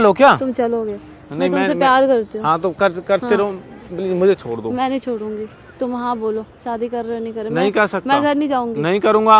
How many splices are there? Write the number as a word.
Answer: zero